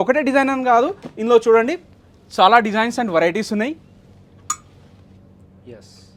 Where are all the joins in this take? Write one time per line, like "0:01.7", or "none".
none